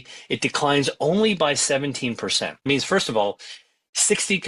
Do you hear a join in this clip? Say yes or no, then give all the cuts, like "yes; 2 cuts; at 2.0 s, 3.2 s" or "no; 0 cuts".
yes; 1 cut; at 2.7 s